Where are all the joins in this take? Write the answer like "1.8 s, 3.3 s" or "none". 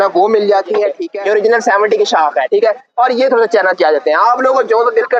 1.0 s